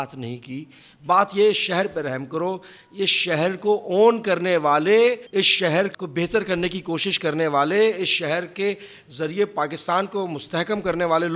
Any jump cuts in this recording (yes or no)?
yes